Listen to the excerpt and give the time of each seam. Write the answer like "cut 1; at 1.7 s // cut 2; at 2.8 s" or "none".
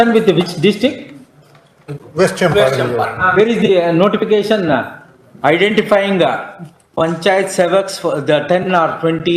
none

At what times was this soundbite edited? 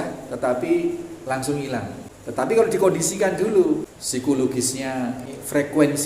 cut 1; at 2.1 s // cut 2; at 4.0 s // cut 3; at 5.2 s

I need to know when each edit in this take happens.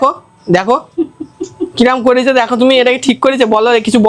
none

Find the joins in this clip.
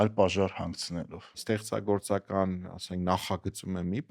cut 1; at 1.4 s

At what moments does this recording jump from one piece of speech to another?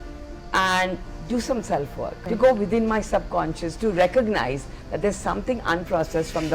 cut 1; at 2.2 s

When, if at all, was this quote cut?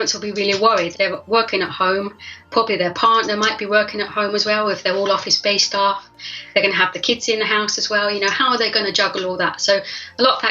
cut 1; at 0.9 s // cut 2; at 2.4 s

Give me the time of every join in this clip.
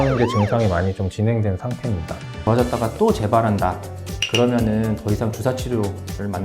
cut 1; at 2.4 s

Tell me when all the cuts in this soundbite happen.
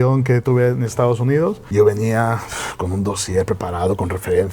cut 1; at 1.6 s

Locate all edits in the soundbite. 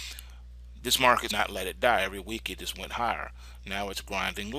none

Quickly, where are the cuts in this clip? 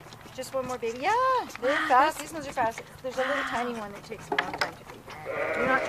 cut 1; at 3.1 s

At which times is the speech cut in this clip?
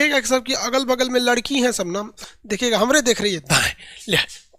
cut 1; at 2.1 s

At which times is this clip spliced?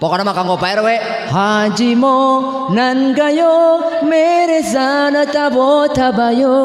none

